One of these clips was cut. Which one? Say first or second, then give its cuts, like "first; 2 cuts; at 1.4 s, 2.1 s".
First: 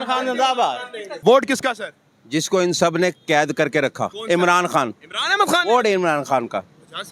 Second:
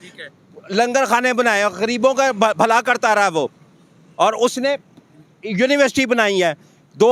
first; 2 cuts; at 1.2 s, 4.2 s